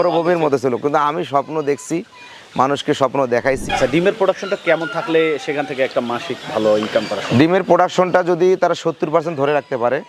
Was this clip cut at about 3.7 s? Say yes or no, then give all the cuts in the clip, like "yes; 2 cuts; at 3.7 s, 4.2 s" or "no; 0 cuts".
yes; 1 cut; at 3.7 s